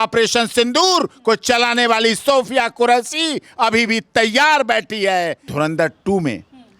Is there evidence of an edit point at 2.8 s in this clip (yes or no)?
no